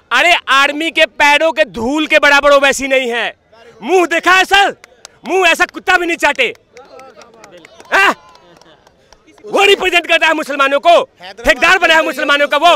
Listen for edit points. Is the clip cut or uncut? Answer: uncut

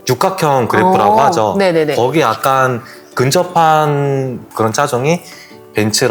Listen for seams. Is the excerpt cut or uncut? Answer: uncut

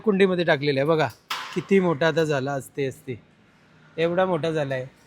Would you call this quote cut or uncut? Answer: uncut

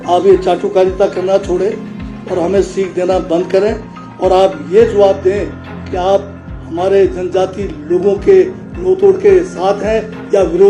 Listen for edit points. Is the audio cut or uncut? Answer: uncut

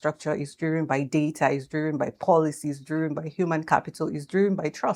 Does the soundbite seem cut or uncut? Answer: uncut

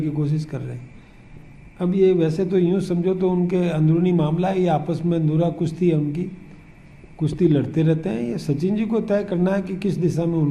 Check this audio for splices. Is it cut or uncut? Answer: uncut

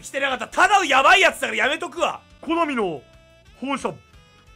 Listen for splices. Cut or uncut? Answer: cut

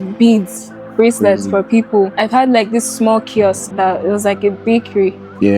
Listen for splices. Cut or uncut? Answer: cut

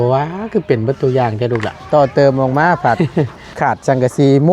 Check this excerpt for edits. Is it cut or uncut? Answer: cut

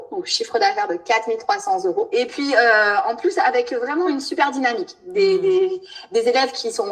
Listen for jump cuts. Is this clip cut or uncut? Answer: cut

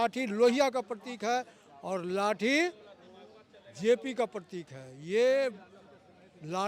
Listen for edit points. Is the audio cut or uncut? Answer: uncut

